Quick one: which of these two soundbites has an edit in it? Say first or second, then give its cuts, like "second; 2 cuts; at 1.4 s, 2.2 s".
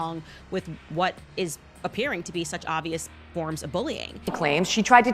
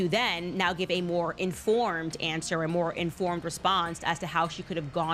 first; 1 cut; at 4.1 s